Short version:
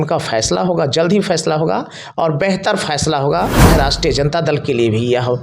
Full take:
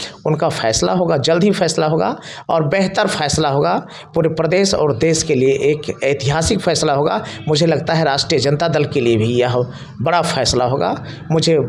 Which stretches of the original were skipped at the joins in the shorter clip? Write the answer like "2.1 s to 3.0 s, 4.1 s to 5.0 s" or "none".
3.9 s to 7.9 s